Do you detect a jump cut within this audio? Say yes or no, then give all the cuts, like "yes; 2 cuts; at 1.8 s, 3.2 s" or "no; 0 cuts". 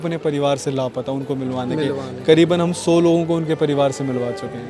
no; 0 cuts